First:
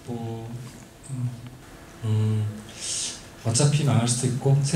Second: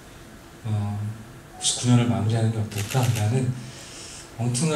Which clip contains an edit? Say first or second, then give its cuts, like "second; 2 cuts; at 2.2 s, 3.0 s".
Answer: first; 1 cut; at 1.6 s